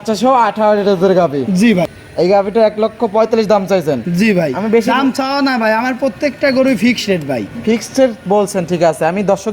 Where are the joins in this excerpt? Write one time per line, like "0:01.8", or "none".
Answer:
0:02.0